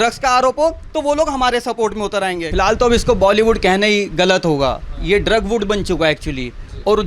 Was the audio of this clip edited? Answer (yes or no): yes